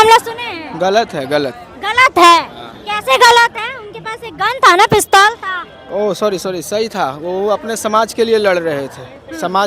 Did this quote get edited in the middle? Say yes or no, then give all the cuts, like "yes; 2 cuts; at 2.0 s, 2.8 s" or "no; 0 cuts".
no; 0 cuts